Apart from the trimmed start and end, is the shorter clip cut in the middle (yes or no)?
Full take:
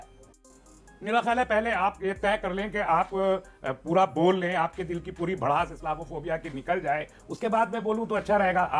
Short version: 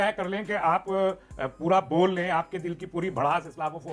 no